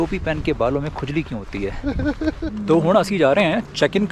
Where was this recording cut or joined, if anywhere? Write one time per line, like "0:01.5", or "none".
0:02.5